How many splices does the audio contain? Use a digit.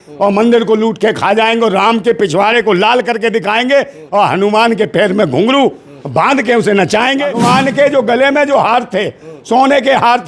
1